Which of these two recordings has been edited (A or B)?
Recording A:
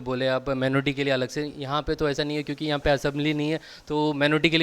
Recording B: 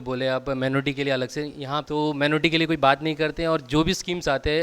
B